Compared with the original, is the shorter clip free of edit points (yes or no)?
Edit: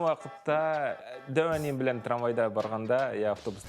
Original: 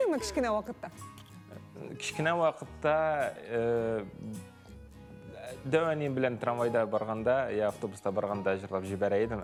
no